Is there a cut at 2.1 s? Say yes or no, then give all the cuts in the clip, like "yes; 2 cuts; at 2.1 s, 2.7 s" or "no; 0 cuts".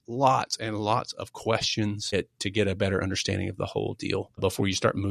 yes; 2 cuts; at 2.1 s, 4.4 s